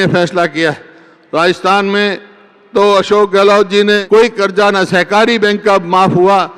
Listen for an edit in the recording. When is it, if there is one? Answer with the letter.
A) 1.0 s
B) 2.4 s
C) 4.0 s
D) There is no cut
C